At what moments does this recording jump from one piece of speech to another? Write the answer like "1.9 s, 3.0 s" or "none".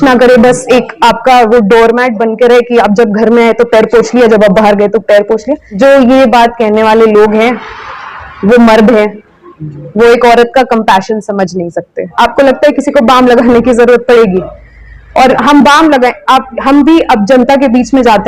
5.6 s, 12.1 s